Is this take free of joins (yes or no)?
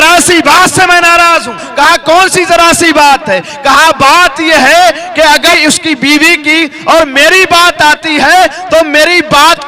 yes